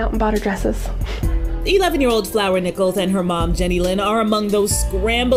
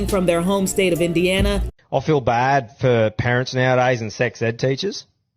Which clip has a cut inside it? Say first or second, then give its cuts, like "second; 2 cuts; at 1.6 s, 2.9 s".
second; 1 cut; at 1.6 s